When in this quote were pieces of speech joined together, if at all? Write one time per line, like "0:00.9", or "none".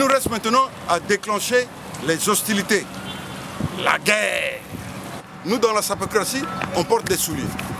0:05.3